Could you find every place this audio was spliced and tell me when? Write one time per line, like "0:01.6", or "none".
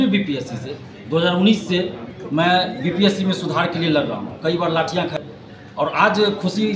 0:05.1